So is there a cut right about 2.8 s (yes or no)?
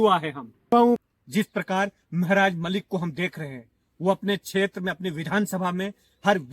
no